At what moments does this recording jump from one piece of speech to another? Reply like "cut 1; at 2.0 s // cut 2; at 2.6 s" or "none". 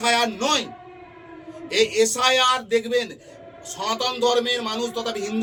none